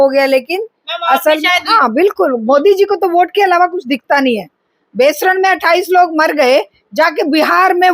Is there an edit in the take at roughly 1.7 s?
yes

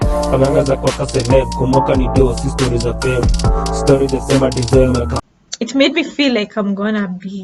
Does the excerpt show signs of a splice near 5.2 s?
yes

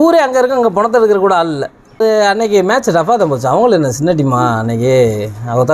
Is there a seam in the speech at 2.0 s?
yes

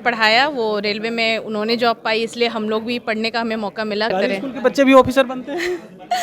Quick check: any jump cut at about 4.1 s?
yes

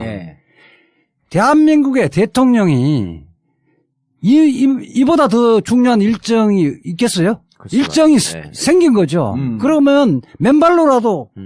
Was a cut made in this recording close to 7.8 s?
yes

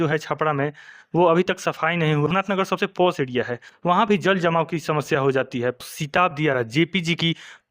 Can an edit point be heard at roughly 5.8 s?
yes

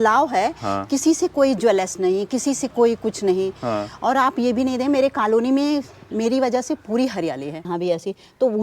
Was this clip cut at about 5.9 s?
no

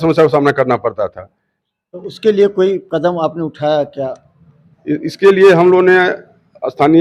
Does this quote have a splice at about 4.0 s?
no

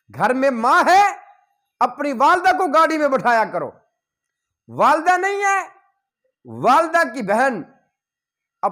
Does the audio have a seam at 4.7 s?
no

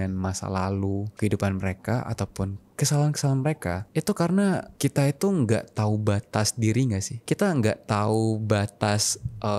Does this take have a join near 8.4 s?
no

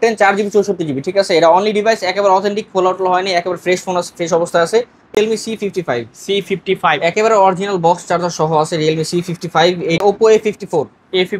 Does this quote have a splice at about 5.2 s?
yes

